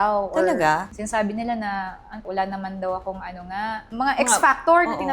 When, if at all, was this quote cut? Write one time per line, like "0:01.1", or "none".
0:00.9
0:03.9